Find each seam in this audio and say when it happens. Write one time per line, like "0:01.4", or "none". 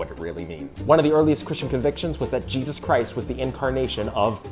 0:01.1